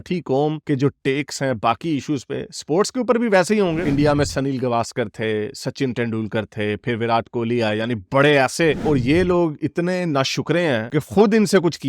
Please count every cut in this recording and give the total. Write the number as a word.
two